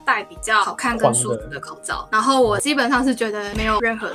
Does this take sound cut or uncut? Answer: uncut